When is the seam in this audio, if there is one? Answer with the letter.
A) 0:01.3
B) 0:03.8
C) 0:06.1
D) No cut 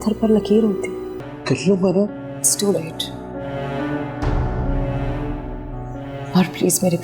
A